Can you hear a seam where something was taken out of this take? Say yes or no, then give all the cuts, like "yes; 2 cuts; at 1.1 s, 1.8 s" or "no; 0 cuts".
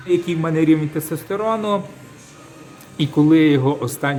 no; 0 cuts